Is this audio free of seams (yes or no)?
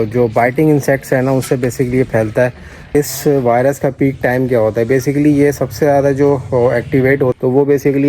no